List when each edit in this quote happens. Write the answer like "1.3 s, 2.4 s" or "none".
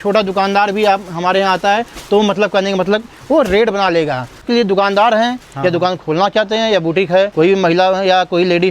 4.4 s, 7.3 s